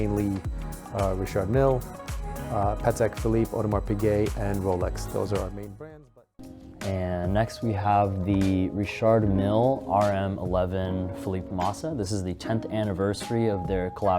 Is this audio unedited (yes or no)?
no